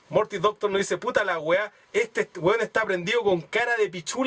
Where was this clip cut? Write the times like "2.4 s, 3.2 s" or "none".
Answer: none